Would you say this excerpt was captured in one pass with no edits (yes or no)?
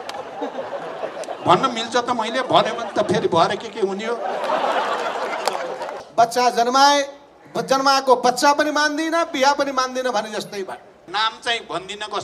no